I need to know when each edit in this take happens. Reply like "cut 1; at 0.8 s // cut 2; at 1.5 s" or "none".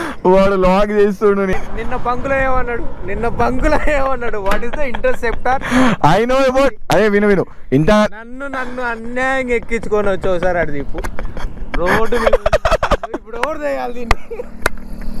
cut 1; at 1.5 s